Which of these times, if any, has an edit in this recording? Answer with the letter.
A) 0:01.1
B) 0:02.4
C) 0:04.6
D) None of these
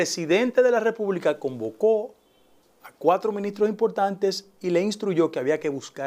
D